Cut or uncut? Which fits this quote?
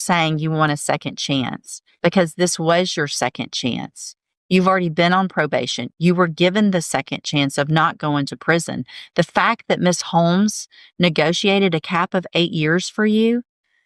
uncut